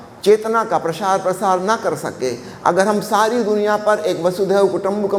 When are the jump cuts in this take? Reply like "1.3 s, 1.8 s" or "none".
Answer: none

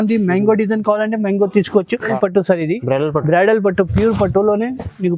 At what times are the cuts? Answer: 2.1 s

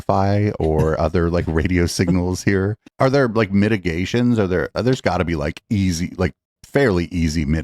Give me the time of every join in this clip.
2.8 s

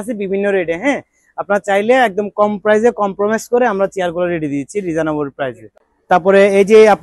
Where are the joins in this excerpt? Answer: none

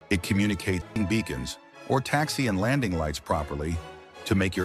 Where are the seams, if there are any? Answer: 1.0 s

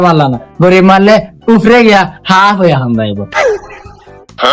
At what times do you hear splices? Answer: 3.3 s

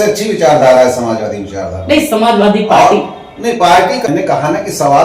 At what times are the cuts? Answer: 4.1 s

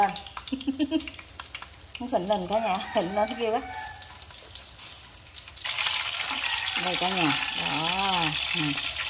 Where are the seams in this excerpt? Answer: 5.6 s

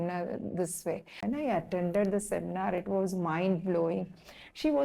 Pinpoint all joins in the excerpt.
1.1 s

